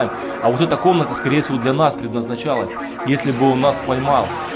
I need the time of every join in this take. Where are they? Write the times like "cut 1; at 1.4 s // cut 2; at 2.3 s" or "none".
none

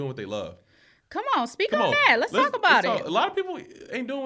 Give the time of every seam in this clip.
none

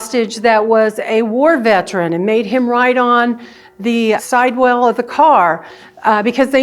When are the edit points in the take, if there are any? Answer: cut 1; at 4.2 s

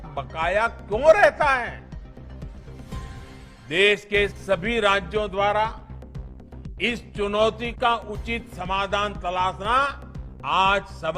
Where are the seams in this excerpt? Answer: cut 1; at 2.3 s // cut 2; at 3.7 s

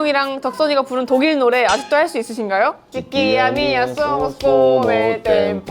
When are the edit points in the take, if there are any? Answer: cut 1; at 2.8 s

